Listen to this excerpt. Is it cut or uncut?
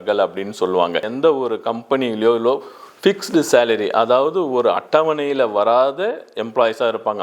cut